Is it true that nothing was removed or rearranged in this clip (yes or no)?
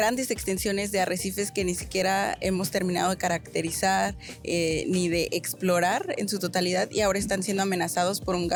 yes